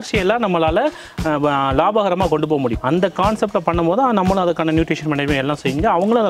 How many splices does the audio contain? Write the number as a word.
one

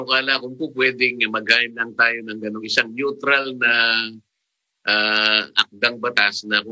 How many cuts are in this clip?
one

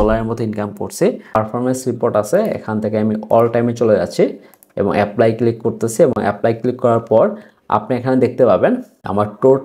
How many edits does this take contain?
one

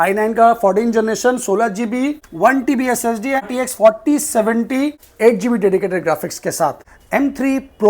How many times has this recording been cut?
four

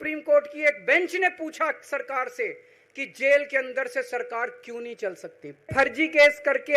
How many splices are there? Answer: one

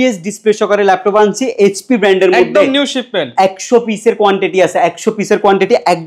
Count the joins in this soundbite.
zero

